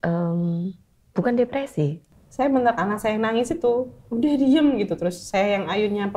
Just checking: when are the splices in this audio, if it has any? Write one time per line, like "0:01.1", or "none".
0:02.0